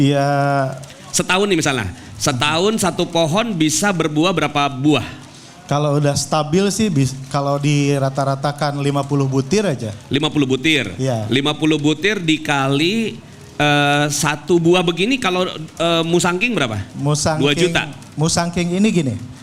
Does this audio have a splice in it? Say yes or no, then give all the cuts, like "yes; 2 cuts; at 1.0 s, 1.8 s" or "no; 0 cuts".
no; 0 cuts